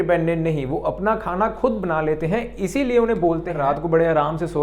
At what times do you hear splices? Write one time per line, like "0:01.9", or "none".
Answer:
0:03.5